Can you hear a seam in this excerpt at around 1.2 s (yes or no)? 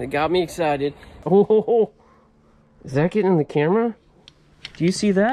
yes